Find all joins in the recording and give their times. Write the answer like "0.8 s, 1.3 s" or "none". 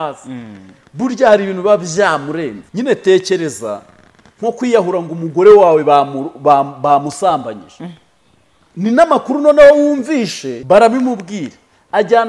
2.6 s, 10.5 s